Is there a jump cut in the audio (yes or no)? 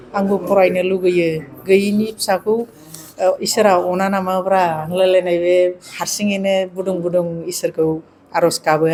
no